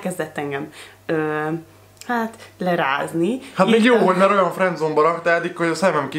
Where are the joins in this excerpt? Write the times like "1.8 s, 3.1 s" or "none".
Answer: none